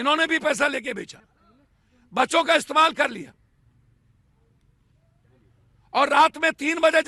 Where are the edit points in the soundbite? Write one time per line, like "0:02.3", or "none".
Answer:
none